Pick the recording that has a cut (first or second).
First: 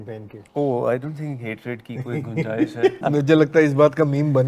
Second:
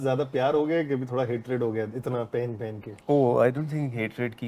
first